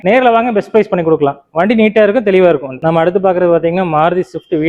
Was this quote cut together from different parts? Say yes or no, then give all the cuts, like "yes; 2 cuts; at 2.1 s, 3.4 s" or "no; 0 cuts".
no; 0 cuts